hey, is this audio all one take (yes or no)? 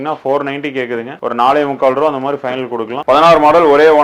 no